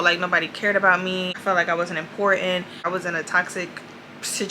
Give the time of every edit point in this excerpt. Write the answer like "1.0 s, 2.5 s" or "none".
1.3 s, 2.8 s